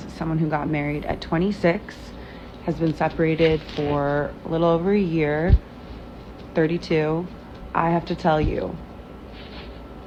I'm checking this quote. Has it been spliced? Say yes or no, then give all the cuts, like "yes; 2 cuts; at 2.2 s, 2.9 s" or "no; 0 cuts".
no; 0 cuts